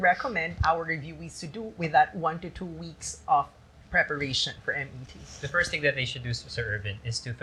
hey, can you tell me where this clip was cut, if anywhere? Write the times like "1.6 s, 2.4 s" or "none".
none